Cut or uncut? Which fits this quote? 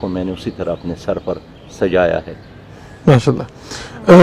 uncut